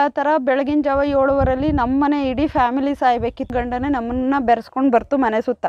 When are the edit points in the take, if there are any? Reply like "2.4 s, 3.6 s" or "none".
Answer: 3.5 s